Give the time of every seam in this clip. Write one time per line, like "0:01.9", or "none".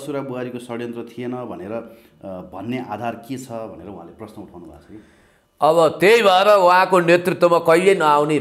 none